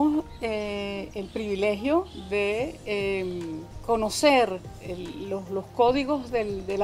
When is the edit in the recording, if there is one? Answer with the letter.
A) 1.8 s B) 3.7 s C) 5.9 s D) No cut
B